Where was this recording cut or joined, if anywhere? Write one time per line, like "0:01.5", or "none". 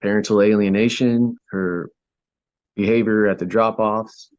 0:01.4